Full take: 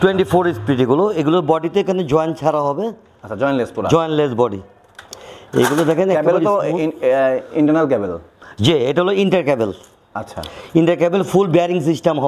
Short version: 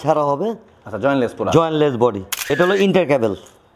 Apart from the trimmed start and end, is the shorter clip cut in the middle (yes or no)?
yes